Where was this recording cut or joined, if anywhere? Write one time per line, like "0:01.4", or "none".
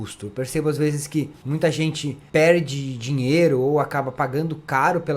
0:01.4
0:02.1